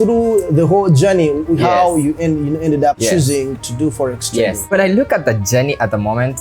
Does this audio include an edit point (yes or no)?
yes